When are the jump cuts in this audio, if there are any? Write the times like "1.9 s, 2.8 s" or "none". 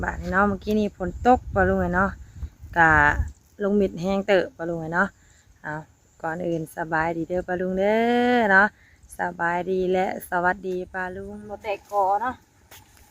11.1 s